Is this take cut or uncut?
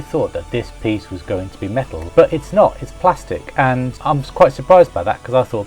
cut